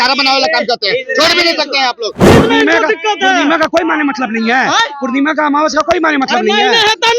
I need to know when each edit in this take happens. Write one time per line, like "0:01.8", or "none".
0:02.2